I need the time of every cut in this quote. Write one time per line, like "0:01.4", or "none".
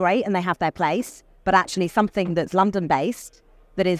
none